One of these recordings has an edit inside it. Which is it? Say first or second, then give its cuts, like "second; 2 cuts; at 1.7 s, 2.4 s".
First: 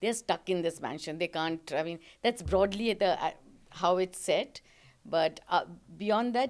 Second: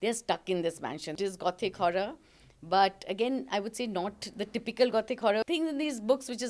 second; 2 cuts; at 1.2 s, 5.4 s